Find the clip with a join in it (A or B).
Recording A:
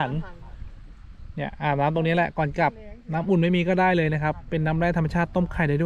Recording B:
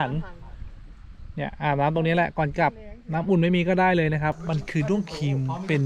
B